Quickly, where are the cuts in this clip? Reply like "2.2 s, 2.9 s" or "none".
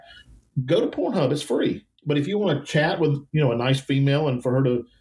1.9 s, 3.2 s